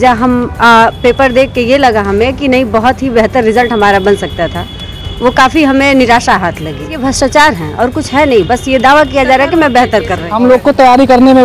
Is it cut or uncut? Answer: cut